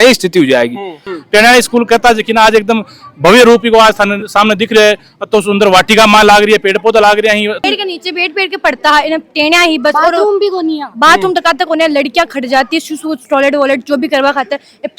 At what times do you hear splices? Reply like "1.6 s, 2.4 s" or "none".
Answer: 1.0 s, 7.6 s